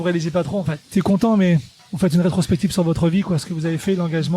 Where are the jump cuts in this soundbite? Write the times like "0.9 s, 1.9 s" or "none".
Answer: 0.9 s, 1.8 s